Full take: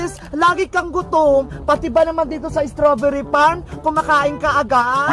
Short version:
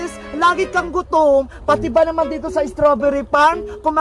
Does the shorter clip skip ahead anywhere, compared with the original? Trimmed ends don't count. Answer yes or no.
no